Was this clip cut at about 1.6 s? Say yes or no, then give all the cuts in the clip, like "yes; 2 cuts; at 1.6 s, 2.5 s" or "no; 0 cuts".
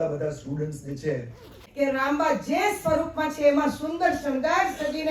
yes; 1 cut; at 1.6 s